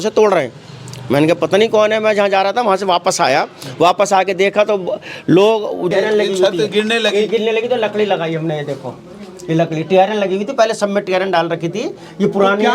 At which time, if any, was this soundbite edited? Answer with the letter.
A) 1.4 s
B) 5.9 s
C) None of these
B